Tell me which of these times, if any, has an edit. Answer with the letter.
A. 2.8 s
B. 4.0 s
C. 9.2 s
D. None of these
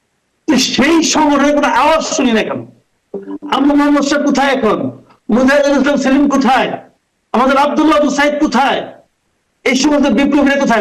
D